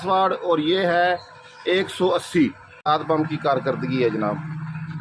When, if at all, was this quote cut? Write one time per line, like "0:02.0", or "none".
0:02.9